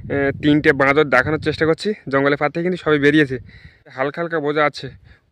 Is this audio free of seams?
no; 1 cut; at 3.9 s

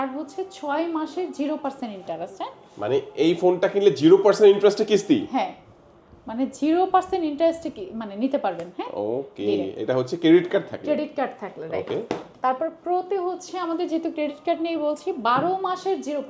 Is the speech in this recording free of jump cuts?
yes; 0 cuts

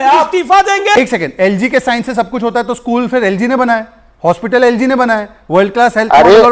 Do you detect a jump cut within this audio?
yes; 1 cut; at 1.0 s

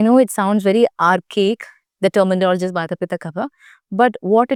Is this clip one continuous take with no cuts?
yes; 0 cuts

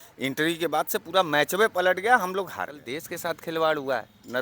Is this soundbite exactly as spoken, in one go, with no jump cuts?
no; 1 cut; at 2.9 s

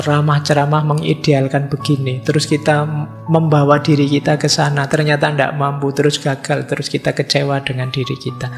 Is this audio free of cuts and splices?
yes; 0 cuts

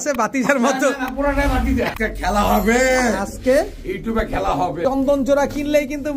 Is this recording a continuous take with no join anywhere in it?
no; 2 cuts; at 1.9 s, 4.8 s

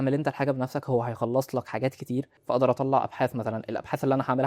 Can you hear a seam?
yes; 1 cut; at 2.4 s

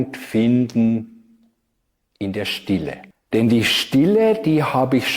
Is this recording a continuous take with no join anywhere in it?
no; 1 cut; at 3.1 s

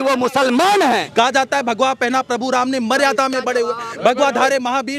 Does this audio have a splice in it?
yes; 1 cut; at 1.1 s

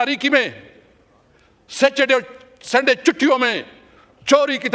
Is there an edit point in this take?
no; 0 cuts

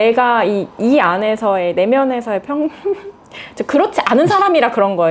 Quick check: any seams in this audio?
no; 0 cuts

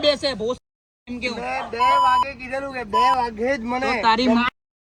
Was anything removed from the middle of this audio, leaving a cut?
no; 0 cuts

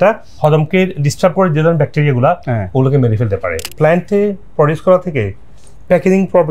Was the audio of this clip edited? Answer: yes; 1 cut; at 3.7 s

